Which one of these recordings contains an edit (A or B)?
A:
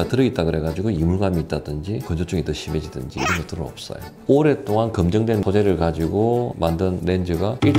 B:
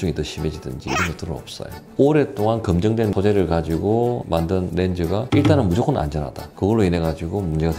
B